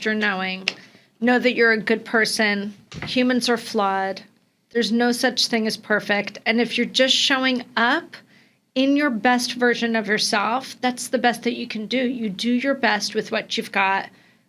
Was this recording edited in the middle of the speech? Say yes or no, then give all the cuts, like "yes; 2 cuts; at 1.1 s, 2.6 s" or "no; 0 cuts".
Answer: no; 0 cuts